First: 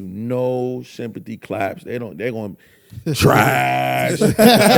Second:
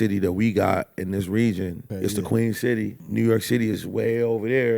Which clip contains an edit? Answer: second; 2 cuts; at 1.8 s, 3.0 s

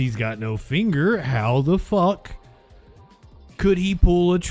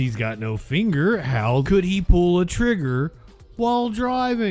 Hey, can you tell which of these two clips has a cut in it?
second; 1 cut; at 1.6 s

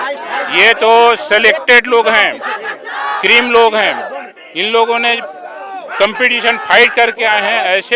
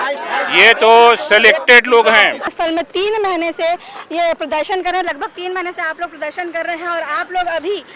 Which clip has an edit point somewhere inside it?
second; 1 cut; at 2.5 s

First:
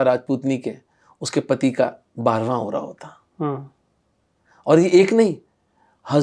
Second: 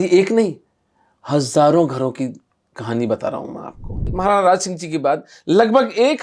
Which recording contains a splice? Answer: second; 1 cut; at 4.1 s

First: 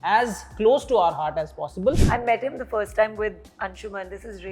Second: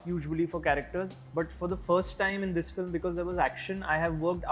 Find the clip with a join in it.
first; 1 cut; at 2.0 s

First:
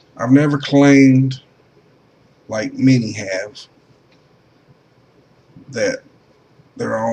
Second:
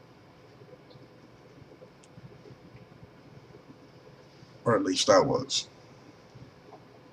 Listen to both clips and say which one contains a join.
second; 1 cut; at 5.6 s

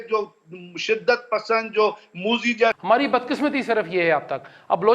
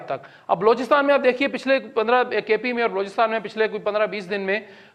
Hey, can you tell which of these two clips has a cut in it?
first; 1 cut; at 2.8 s

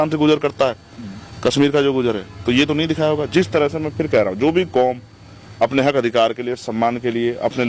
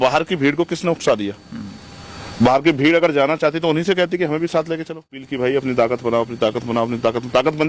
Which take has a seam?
second; 1 cut; at 5.2 s

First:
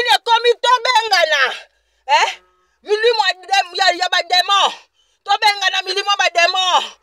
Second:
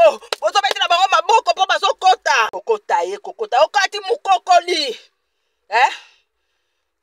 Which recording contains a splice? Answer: second; 1 cut; at 2.6 s

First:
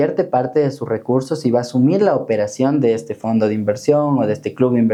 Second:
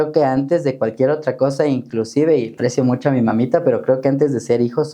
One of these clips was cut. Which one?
second; 1 cut; at 2.5 s

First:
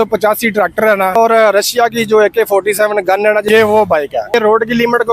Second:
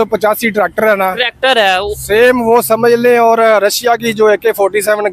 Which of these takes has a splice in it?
first; 3 cuts; at 1.1 s, 3.4 s, 4.3 s

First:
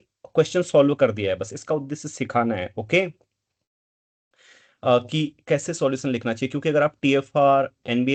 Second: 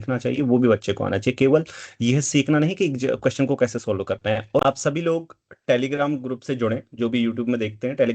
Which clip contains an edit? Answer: second; 1 cut; at 4.6 s

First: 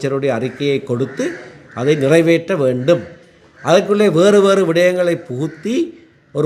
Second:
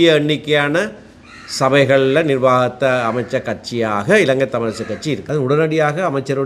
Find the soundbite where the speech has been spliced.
second; 1 cut; at 5.2 s

